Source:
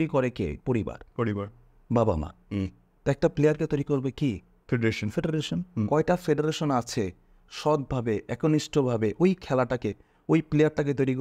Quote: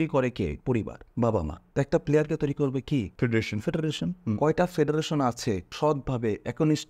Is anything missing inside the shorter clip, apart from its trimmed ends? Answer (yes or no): yes